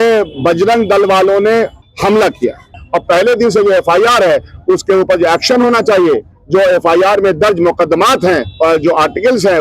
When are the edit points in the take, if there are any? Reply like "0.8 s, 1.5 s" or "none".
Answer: 1.8 s, 2.8 s, 6.3 s, 8.5 s

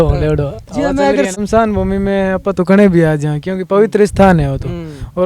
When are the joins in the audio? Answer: 1.4 s

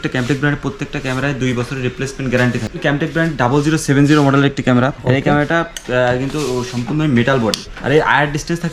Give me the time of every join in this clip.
2.8 s, 5.0 s, 7.7 s

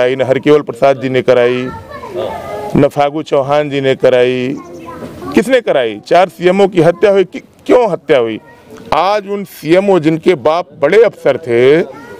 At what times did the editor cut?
none

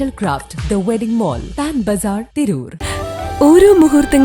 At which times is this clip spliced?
2.7 s

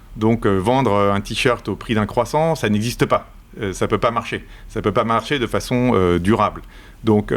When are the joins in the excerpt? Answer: none

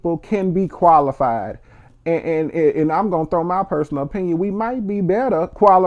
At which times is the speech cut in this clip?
none

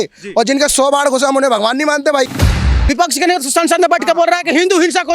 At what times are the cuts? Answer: 2.5 s

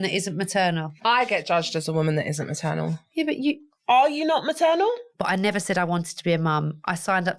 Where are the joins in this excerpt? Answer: 0.9 s, 5.1 s

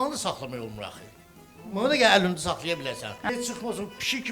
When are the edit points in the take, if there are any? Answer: 3.1 s

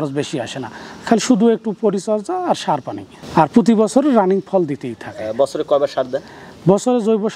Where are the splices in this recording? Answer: none

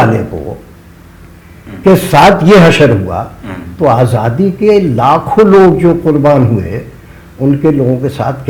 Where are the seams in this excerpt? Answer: none

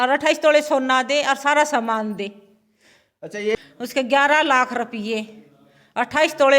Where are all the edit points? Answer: 3.6 s

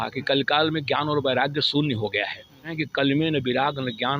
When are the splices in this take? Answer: 2.8 s

